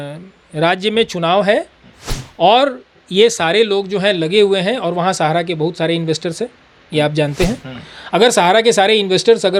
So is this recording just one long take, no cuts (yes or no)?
yes